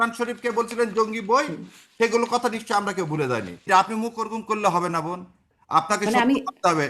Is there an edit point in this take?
yes; 1 cut; at 3.7 s

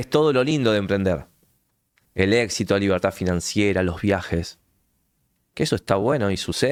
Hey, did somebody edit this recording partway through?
no; 0 cuts

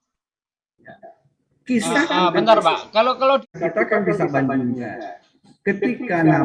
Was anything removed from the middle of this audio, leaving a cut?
yes; 1 cut; at 3.5 s

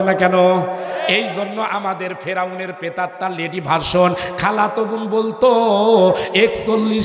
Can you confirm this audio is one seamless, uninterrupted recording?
yes; 0 cuts

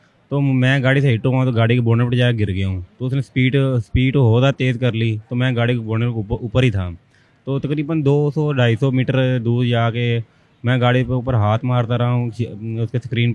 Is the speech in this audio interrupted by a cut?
no; 0 cuts

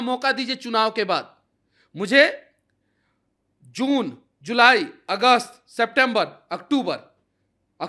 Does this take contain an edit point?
no; 0 cuts

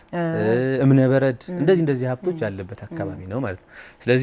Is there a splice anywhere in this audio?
no; 0 cuts

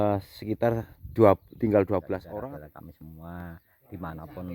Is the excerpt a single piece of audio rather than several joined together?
no; 1 cut; at 2.3 s

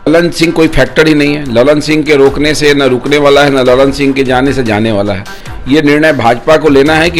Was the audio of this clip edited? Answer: no; 0 cuts

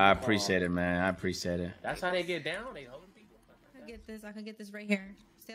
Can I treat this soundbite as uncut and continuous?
no; 1 cut; at 3.9 s

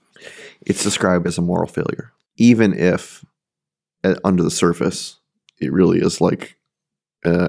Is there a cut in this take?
yes; 1 cut; at 2.1 s

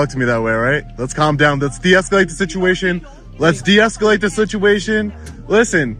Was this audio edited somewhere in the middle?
no; 0 cuts

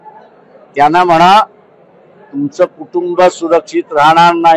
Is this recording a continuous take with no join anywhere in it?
yes; 0 cuts

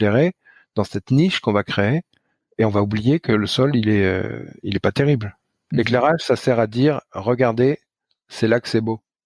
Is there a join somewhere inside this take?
yes; 1 cut; at 5.6 s

